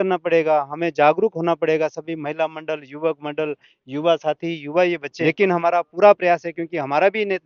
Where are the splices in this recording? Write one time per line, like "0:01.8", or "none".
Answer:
0:05.1

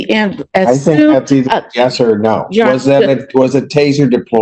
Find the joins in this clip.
none

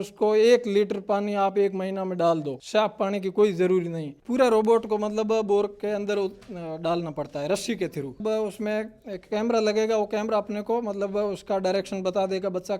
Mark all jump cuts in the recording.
0:04.1
0:08.2

